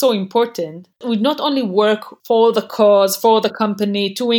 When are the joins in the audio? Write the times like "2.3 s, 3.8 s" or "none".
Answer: 1.0 s, 2.1 s